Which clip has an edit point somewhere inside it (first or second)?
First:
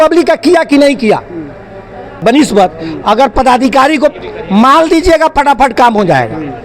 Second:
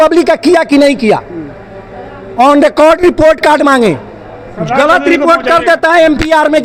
first